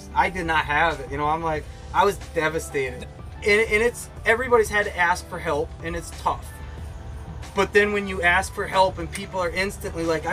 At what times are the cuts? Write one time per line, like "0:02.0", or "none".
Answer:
0:03.0